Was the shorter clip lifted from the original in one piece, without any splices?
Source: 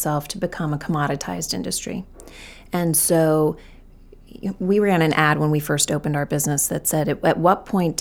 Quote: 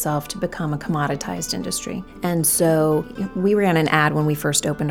no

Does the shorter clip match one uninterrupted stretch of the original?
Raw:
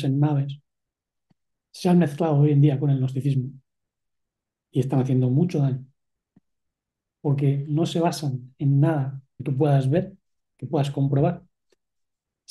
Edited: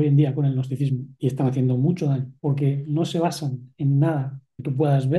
no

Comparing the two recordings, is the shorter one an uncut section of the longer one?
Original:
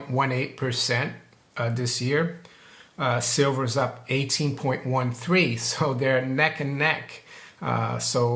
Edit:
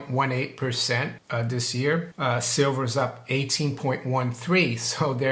no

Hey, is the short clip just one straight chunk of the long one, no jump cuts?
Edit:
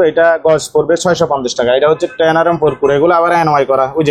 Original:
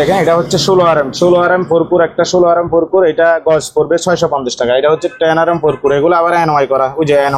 yes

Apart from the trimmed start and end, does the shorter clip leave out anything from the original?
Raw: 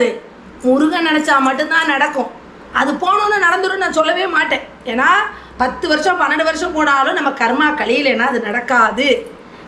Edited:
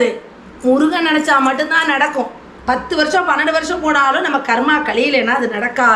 yes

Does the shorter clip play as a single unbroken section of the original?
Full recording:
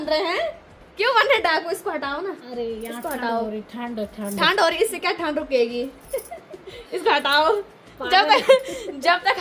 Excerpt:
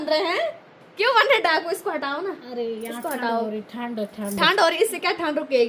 yes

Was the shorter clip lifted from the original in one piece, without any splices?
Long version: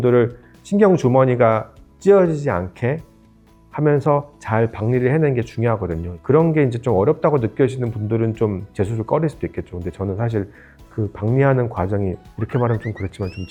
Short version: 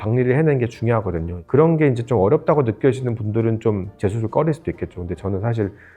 yes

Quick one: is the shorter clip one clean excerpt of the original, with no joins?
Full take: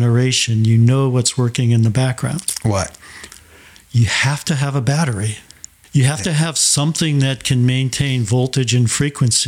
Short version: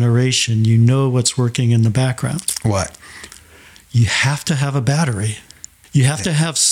yes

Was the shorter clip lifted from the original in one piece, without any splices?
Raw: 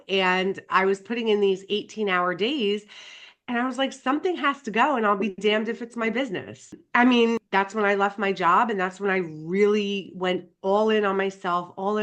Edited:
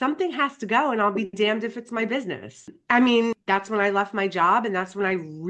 yes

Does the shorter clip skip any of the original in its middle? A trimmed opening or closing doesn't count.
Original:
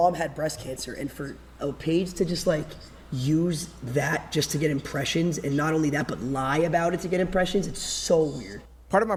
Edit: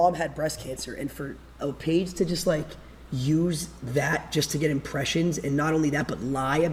no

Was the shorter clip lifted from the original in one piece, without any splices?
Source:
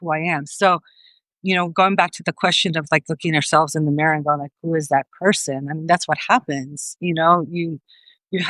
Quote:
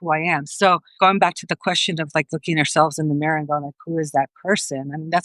no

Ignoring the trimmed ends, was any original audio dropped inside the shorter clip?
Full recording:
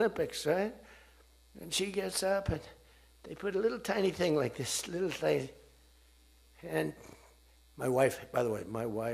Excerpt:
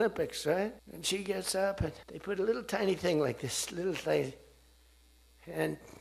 yes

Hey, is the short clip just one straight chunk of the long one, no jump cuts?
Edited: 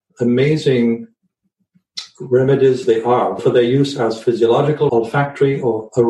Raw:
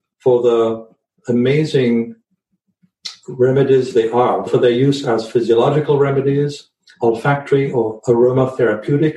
no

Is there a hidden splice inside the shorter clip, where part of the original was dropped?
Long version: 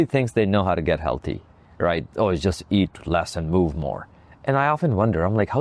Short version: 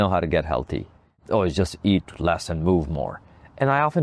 yes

